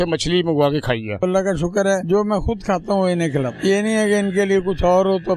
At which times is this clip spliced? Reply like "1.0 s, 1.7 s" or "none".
1.2 s, 2.0 s, 3.5 s